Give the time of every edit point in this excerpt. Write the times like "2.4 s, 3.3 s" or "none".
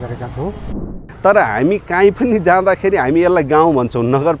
1.1 s